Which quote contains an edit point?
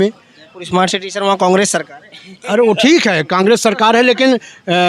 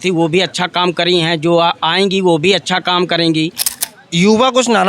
second; 1 cut; at 3.8 s

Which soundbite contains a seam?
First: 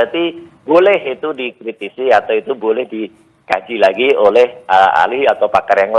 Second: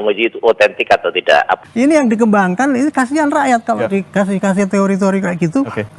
second; 1 cut; at 1.6 s

